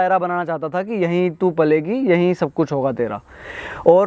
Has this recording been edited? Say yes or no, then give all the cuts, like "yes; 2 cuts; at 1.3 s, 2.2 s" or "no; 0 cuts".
no; 0 cuts